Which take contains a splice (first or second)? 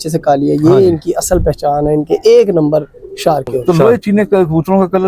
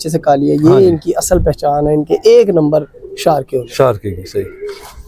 first